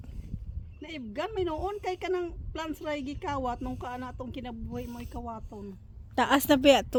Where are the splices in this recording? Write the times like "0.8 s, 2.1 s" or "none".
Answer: none